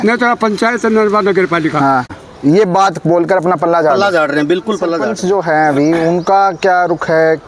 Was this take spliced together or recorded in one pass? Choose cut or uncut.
cut